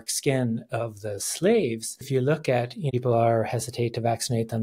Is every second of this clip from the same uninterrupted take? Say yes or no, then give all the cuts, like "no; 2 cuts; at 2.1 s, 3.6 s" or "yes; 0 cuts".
no; 2 cuts; at 2.0 s, 2.9 s